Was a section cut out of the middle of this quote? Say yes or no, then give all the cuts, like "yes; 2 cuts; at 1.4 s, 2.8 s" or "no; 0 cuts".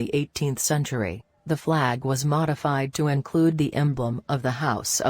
yes; 1 cut; at 1.5 s